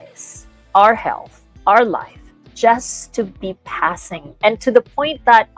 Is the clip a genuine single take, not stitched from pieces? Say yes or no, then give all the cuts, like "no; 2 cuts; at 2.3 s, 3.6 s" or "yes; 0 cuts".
yes; 0 cuts